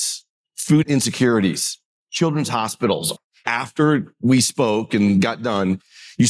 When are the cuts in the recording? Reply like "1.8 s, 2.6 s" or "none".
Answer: 0.7 s, 3.2 s